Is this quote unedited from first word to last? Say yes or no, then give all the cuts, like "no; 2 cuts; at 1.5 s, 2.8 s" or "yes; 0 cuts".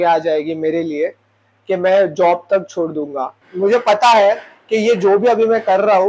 no; 1 cut; at 3.4 s